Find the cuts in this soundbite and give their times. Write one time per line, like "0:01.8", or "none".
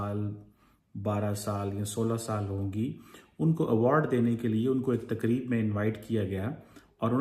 none